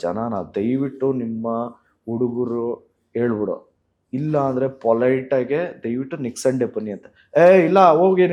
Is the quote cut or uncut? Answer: uncut